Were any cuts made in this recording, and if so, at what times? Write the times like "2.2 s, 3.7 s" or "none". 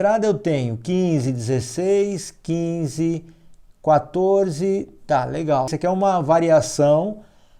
5.7 s